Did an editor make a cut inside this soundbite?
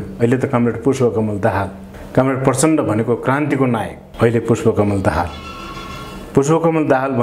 no; 0 cuts

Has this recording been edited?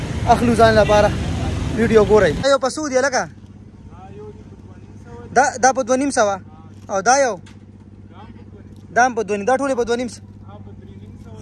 yes; 1 cut; at 2.4 s

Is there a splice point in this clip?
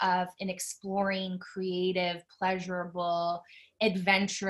no; 0 cuts

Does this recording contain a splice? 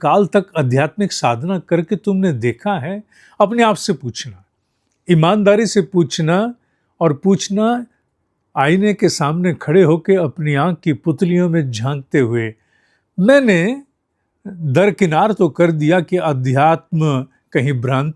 no; 0 cuts

